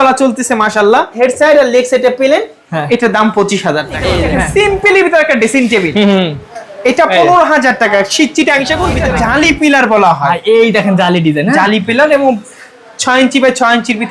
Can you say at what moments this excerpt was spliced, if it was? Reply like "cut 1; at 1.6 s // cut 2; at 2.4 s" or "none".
cut 1; at 1.2 s // cut 2; at 4.2 s // cut 3; at 9.0 s